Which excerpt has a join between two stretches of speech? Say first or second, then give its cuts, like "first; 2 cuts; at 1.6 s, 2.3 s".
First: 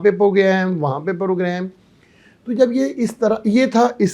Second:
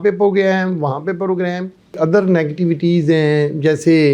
second; 1 cut; at 1.9 s